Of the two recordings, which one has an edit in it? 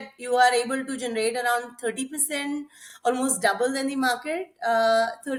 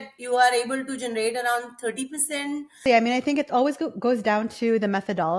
second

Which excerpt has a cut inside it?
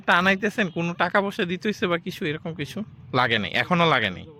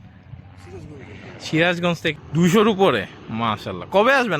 second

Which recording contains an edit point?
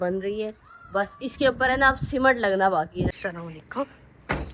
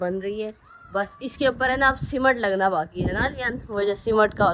first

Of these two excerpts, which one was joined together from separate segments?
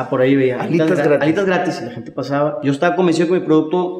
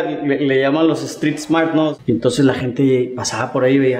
second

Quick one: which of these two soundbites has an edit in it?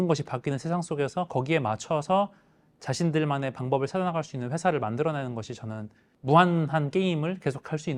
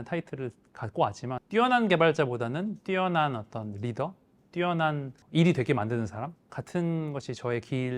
second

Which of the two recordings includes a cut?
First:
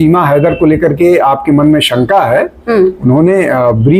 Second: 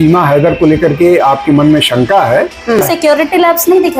second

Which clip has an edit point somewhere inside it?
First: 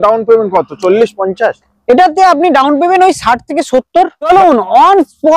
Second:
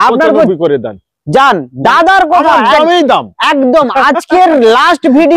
first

